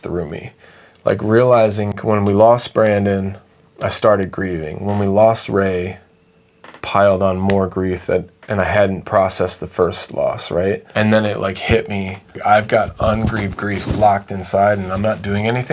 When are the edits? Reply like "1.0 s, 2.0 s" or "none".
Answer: 1.9 s, 10.9 s, 12.4 s